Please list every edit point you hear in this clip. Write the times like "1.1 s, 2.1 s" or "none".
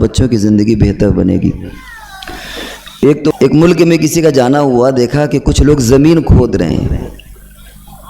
3.3 s

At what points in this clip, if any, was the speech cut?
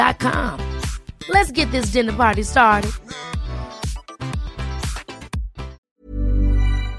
5.8 s

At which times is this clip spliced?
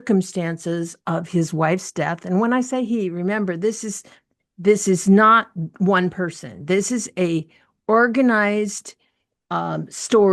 none

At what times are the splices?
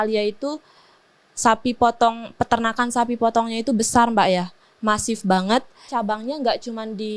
5.8 s

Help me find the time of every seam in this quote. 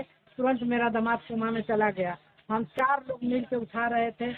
none

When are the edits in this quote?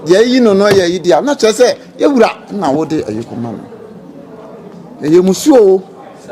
none

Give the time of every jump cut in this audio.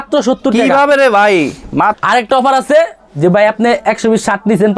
1.9 s

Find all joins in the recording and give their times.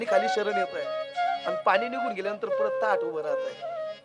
1.3 s

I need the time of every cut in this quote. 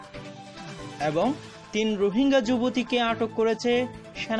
1.0 s

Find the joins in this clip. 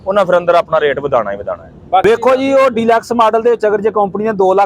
2.0 s

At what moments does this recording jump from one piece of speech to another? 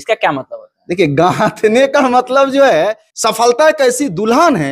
3.1 s

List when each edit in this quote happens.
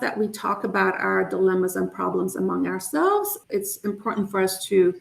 3.4 s

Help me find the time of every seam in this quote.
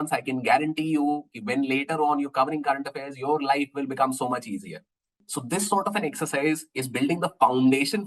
5.2 s

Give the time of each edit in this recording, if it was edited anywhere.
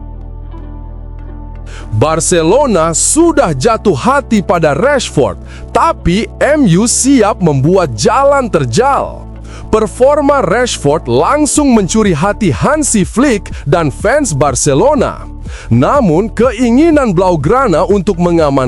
1.9 s

